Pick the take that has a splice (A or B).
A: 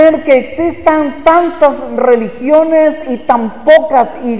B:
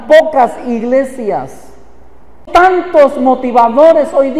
B